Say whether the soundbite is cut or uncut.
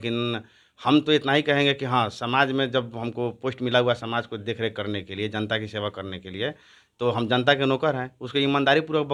uncut